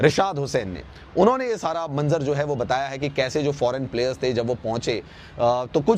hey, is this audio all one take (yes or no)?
yes